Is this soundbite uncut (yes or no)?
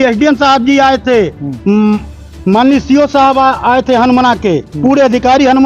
yes